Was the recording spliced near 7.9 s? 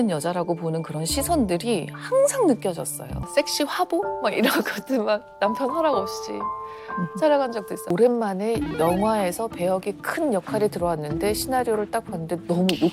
yes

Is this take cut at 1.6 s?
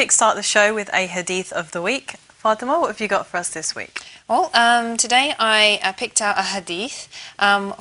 yes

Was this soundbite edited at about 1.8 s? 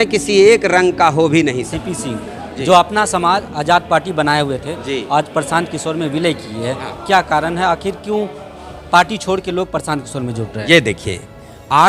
yes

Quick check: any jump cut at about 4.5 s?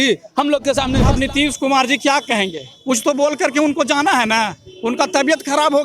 no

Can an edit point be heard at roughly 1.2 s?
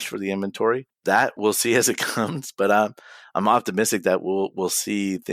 yes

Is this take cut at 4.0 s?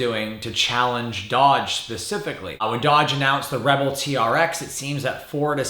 no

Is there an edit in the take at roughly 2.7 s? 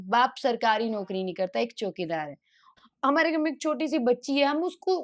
yes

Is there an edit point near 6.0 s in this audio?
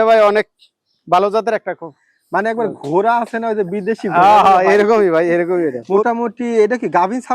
yes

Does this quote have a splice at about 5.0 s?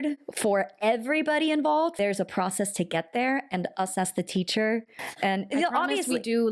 yes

